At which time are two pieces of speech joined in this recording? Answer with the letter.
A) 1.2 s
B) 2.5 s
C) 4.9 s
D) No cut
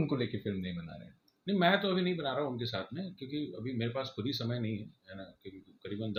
D